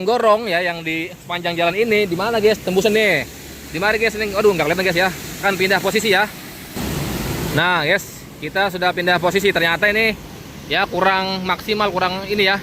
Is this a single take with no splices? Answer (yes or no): no